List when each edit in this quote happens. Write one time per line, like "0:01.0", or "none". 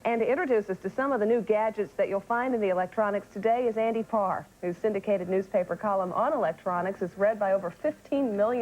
0:03.1